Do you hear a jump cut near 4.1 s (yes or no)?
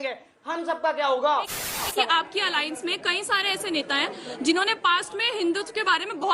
no